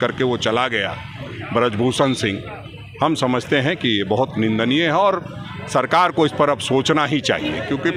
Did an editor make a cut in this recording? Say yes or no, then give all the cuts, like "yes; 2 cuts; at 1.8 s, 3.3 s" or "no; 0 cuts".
no; 0 cuts